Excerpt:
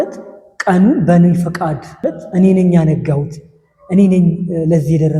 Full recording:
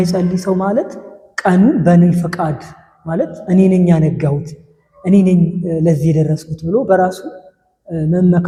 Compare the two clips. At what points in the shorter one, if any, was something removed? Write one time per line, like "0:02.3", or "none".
0:01.9